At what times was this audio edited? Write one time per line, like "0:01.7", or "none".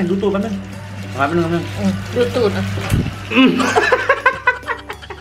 none